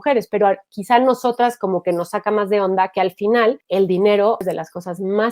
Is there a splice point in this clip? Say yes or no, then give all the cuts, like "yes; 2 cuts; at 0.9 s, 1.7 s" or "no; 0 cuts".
yes; 1 cut; at 4.4 s